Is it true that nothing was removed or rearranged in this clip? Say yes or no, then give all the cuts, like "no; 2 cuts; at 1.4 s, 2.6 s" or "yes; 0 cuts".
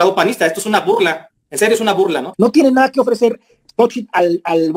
no; 1 cut; at 2.3 s